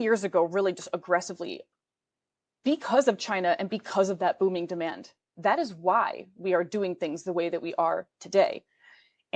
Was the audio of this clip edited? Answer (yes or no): no